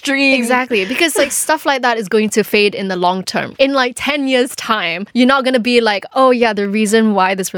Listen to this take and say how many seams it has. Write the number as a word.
two